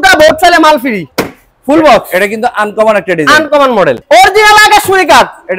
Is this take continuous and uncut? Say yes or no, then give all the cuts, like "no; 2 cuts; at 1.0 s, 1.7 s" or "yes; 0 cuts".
no; 2 cuts; at 1.1 s, 4.0 s